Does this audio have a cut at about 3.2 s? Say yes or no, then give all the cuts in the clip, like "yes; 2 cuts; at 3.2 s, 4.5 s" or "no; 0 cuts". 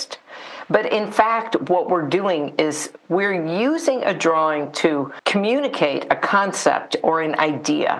no; 1 cut; at 5.1 s